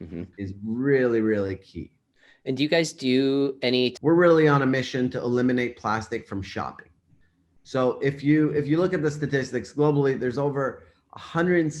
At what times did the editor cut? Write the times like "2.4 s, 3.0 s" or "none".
4.0 s